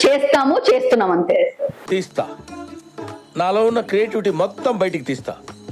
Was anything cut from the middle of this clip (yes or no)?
no